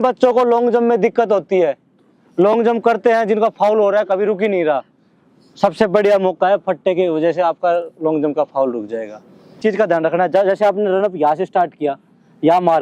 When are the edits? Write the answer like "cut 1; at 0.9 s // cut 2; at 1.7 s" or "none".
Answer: cut 1; at 9.6 s